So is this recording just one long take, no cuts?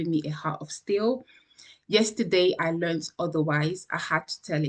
yes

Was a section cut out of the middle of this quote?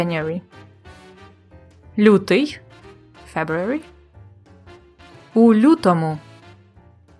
yes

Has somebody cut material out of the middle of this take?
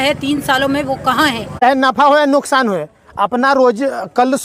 yes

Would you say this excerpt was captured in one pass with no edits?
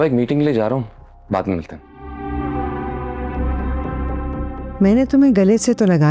no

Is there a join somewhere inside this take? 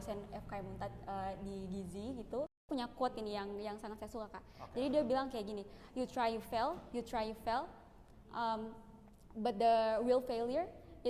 yes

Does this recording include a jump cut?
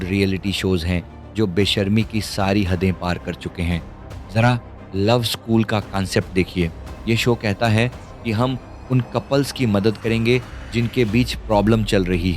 no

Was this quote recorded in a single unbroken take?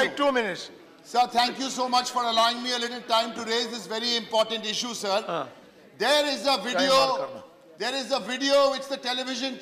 no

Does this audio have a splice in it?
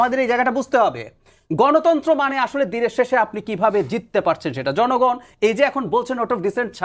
no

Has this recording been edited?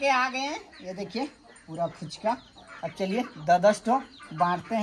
no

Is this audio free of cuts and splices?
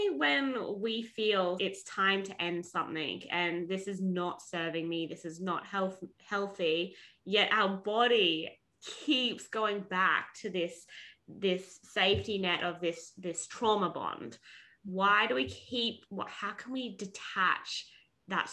no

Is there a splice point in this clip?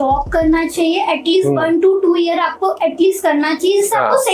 no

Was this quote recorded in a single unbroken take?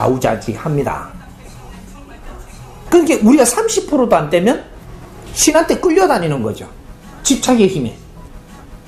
yes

